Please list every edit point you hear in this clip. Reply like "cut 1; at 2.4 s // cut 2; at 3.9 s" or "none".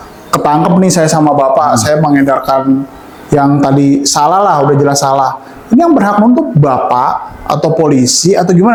none